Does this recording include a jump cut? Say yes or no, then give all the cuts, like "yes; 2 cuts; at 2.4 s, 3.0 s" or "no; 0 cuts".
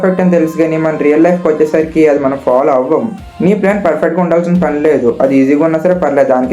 no; 0 cuts